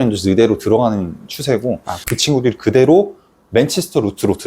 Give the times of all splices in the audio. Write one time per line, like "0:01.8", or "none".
0:01.9